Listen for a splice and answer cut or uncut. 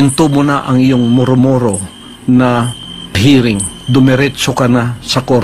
uncut